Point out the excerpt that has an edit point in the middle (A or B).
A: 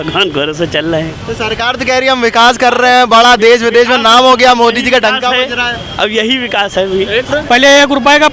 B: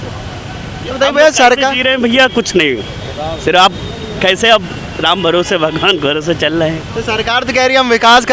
A